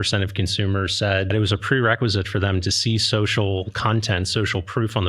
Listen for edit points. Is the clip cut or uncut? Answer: cut